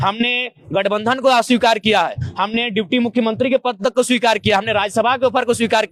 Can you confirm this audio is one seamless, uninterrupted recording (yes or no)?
yes